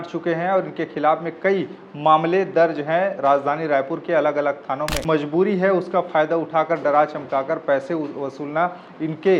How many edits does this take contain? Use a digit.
1